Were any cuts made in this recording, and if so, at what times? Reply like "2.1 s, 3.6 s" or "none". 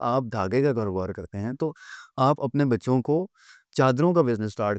none